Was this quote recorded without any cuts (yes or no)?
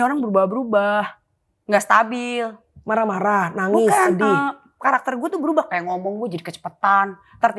yes